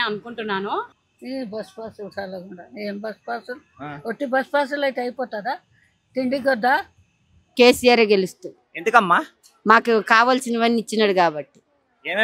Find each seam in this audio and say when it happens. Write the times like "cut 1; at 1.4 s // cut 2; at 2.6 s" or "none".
cut 1; at 0.9 s // cut 2; at 7.4 s